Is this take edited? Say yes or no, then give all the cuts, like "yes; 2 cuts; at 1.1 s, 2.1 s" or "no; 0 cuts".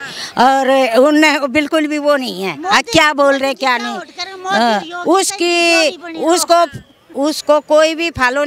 no; 0 cuts